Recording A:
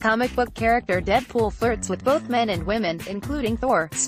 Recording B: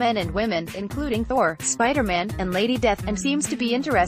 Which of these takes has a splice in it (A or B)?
B